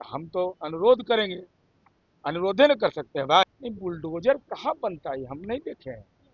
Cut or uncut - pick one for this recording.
cut